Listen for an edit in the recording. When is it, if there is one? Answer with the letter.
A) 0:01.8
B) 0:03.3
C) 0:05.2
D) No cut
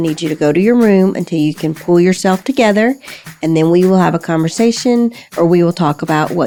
D